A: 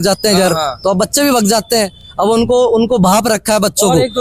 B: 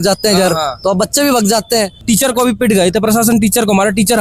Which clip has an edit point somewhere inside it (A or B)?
B